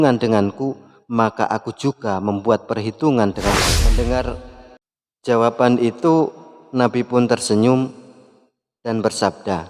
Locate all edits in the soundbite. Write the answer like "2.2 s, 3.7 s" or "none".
3.8 s